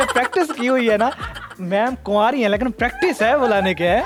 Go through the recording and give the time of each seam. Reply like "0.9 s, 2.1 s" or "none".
none